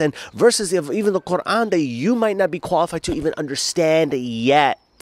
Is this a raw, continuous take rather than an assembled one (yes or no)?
yes